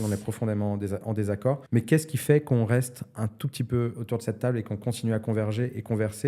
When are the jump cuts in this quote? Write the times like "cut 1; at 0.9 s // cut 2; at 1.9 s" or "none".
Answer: cut 1; at 1.6 s